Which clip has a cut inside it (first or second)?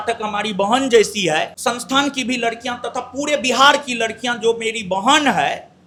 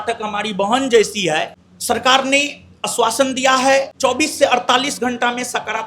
second